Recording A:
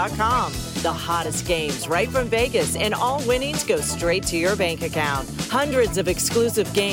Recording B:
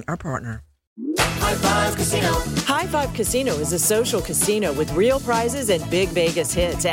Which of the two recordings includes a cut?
B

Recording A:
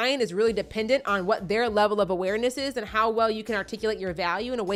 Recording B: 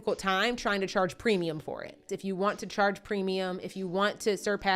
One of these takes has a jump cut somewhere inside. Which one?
B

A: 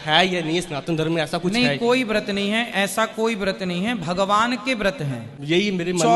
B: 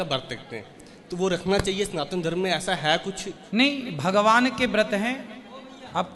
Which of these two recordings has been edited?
A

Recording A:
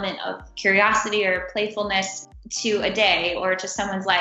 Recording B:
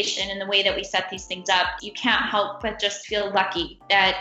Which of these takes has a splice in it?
B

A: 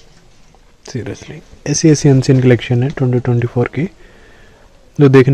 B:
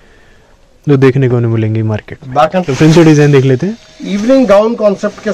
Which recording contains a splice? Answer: B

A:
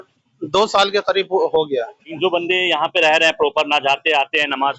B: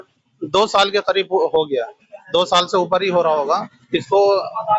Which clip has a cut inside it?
A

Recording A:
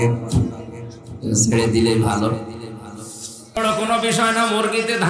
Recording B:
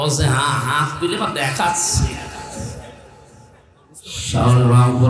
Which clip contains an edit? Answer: A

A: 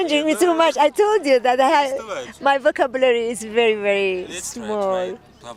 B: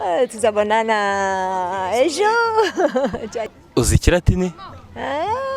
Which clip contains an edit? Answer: B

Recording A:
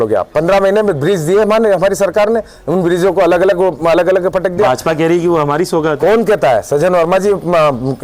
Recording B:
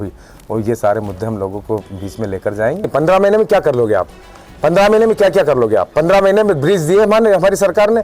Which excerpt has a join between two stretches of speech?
B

